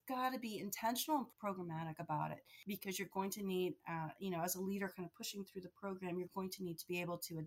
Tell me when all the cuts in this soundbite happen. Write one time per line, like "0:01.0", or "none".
0:01.3
0:02.5

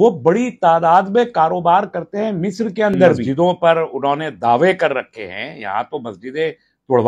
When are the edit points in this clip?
0:03.2

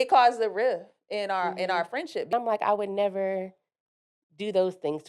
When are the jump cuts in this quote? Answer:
0:02.3

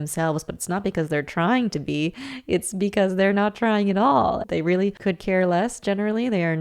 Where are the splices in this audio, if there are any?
0:04.4

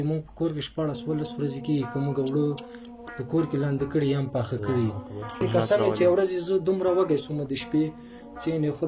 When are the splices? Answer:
0:05.4

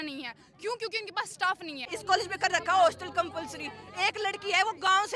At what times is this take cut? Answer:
0:01.9

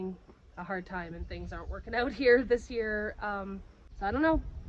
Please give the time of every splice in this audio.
0:03.8

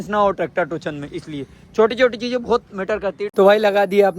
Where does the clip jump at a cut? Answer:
0:03.2

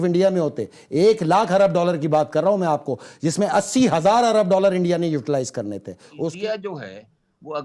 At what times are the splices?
0:06.2

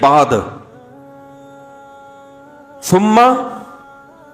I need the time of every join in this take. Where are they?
0:01.1
0:02.7

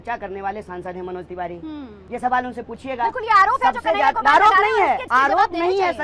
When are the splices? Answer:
0:02.0
0:05.0

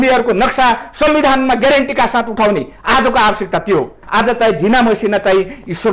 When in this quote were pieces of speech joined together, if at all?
0:04.0

